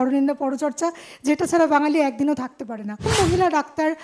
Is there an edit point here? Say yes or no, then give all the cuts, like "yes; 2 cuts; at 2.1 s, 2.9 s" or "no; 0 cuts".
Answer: yes; 1 cut; at 3.1 s